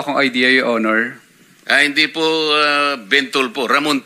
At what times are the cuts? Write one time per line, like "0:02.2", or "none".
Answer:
none